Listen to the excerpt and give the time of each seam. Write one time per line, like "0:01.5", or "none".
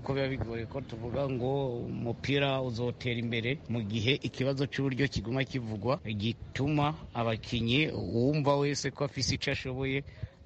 0:03.6
0:06.1